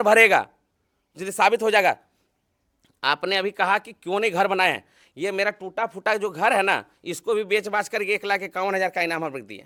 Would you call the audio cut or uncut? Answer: uncut